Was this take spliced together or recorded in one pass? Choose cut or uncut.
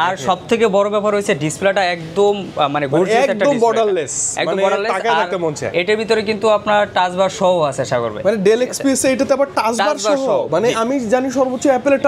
uncut